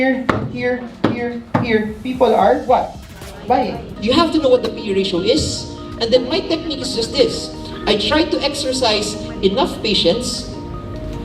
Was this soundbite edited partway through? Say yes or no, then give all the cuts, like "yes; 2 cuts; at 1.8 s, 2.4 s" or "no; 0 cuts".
yes; 1 cut; at 3.9 s